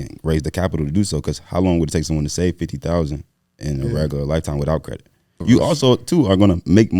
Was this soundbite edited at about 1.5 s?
no; 1 cut; at 5.4 s

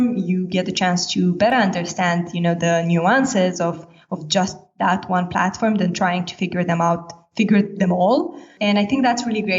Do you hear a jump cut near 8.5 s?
yes; 1 cut; at 8.5 s

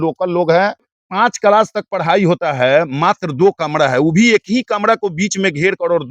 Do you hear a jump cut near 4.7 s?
no; 1 cut; at 1.0 s

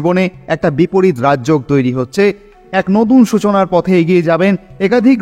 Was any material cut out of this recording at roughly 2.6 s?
yes; 1 cut; at 2.6 s

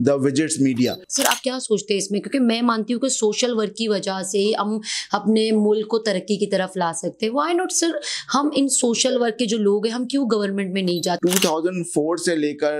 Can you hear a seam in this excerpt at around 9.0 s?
no; 2 cuts; at 1.1 s, 11.2 s

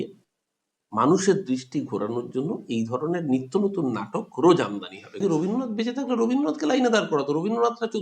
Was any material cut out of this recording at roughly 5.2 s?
yes; 1 cut; at 5.2 s

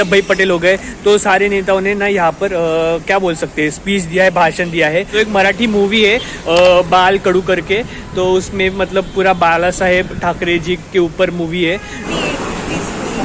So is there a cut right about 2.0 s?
no; 2 cuts; at 5.1 s, 12.0 s

